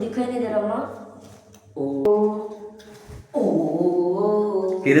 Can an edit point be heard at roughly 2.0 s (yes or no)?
yes